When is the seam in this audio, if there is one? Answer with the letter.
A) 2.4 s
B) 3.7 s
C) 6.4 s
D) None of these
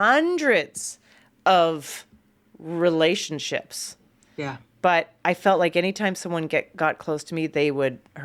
D